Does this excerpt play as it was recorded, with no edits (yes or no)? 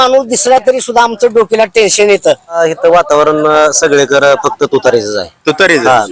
no